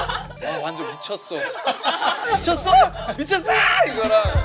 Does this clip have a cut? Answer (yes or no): no